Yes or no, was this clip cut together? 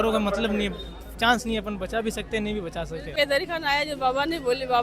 yes